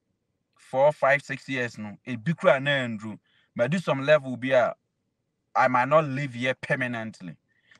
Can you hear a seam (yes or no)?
no